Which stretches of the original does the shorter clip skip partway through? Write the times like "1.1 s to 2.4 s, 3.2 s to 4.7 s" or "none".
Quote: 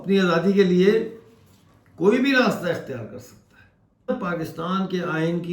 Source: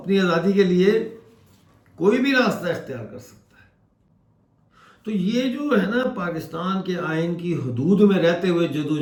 4.1 s to 6.0 s

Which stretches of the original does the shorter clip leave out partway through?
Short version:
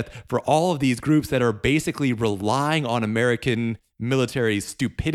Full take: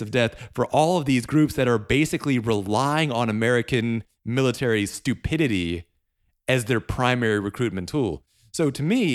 none

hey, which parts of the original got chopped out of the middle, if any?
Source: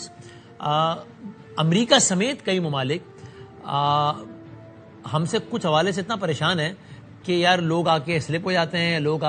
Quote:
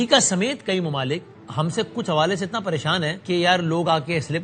3.2 s to 4.9 s, 6.7 s to 7.2 s

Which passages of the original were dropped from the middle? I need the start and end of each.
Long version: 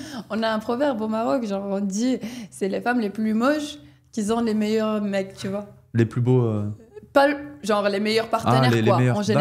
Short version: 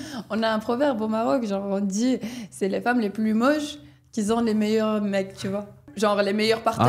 5.8 s to 7.5 s

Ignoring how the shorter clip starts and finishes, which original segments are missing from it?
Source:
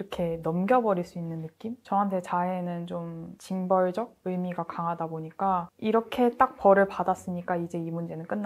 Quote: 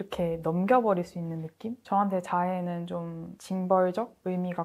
none

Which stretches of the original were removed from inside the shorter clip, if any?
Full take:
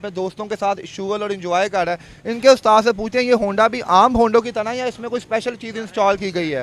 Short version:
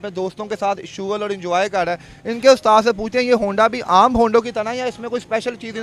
none

